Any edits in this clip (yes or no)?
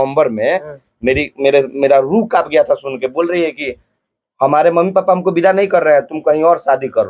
no